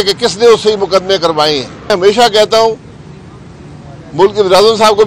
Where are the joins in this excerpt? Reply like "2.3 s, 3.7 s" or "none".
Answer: 1.9 s